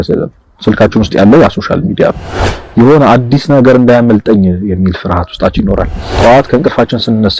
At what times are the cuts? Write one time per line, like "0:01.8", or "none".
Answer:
0:06.1